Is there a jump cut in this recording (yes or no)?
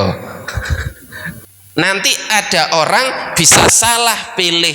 yes